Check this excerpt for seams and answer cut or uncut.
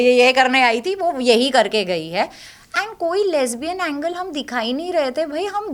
uncut